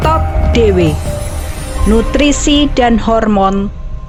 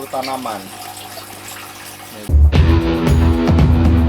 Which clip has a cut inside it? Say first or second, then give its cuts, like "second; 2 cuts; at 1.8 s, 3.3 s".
second; 1 cut; at 2.3 s